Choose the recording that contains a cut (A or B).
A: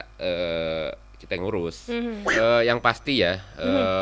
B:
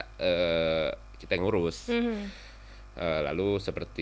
A